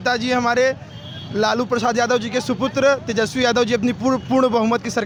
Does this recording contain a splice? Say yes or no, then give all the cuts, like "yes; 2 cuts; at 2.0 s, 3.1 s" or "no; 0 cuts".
no; 0 cuts